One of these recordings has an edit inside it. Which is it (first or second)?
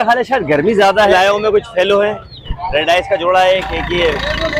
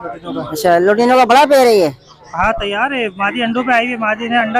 first